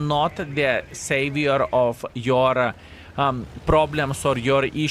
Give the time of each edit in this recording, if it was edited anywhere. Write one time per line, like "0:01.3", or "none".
none